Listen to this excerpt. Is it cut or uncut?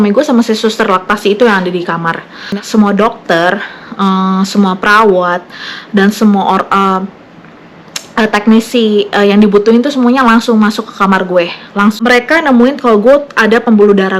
cut